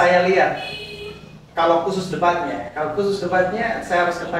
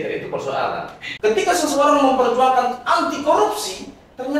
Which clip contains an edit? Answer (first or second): second